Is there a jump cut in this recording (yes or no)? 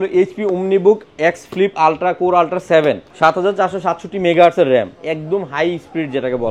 yes